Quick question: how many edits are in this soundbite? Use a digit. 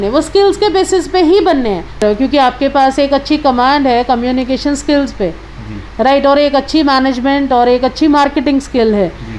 0